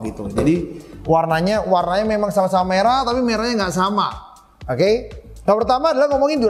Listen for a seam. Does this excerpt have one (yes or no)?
no